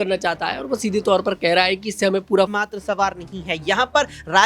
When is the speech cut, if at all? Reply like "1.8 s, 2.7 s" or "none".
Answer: 2.5 s